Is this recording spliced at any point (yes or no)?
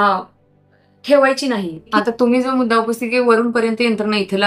yes